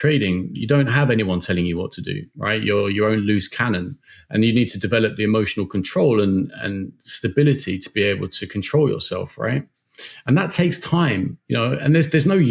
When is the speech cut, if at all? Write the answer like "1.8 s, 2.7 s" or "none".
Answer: none